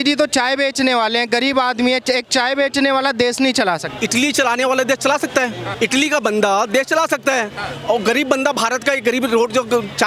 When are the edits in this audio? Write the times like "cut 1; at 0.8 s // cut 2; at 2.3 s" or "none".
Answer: cut 1; at 3.9 s // cut 2; at 5.6 s